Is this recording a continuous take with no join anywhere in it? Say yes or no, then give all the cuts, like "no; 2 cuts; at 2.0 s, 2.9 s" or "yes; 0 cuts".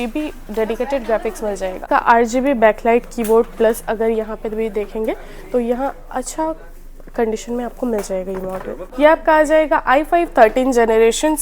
no; 2 cuts; at 1.8 s, 8.8 s